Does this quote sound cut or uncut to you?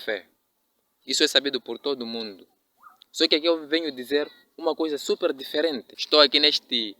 cut